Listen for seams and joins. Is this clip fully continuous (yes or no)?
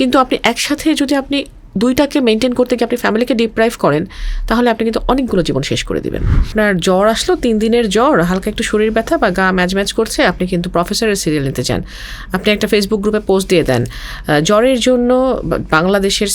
no